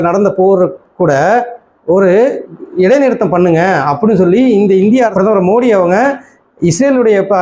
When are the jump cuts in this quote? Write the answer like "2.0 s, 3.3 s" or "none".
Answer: 5.1 s